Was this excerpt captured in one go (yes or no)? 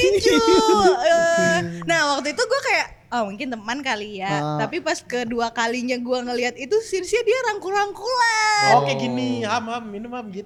yes